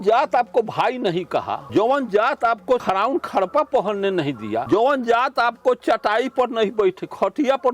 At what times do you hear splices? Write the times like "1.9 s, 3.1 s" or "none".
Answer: 1.6 s, 2.8 s, 4.6 s